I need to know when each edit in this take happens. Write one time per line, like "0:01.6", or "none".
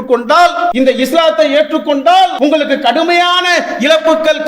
0:00.7
0:02.3